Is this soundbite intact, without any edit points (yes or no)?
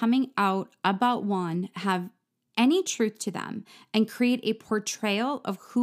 yes